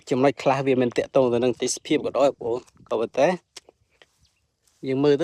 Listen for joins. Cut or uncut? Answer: uncut